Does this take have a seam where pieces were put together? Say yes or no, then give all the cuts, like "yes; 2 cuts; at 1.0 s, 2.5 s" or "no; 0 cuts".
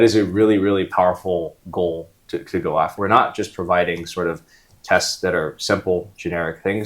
yes; 1 cut; at 2.9 s